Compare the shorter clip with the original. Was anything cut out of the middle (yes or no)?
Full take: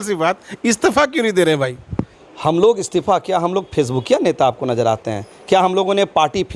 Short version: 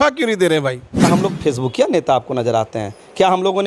yes